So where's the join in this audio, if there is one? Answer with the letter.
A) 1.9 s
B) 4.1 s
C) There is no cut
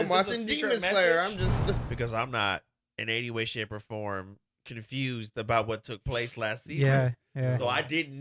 A